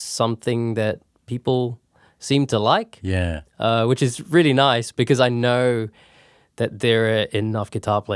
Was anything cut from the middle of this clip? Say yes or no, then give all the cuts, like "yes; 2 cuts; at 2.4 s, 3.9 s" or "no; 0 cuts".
no; 0 cuts